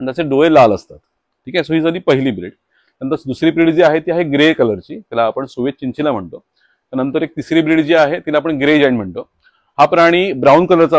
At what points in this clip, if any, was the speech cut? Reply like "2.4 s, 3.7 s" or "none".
none